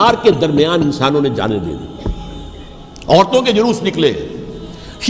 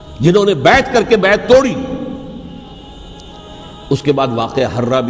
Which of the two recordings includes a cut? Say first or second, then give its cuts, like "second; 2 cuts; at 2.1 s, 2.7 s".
second; 1 cut; at 2.7 s